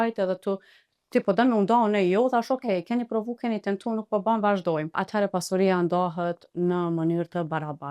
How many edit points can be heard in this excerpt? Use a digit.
1